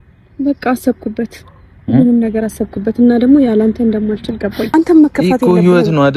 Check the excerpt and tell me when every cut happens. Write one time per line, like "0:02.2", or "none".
0:04.6